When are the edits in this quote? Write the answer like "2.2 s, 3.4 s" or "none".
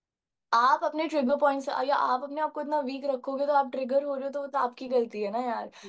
none